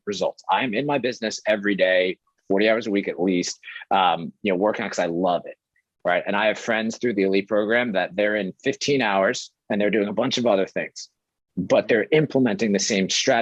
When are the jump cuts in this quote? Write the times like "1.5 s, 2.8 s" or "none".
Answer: none